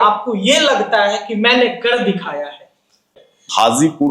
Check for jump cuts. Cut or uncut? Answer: cut